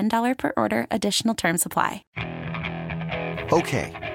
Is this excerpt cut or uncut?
cut